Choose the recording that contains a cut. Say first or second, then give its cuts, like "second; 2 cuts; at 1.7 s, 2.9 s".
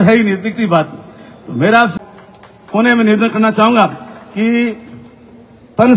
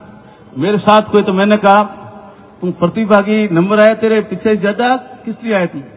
first; 1 cut; at 2.0 s